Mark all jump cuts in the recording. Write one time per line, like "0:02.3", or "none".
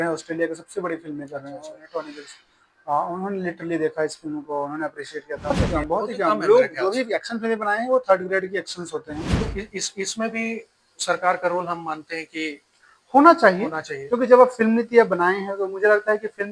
0:05.5
0:09.3